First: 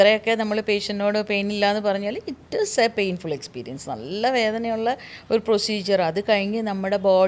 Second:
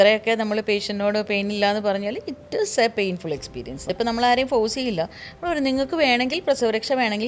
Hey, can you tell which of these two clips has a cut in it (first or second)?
second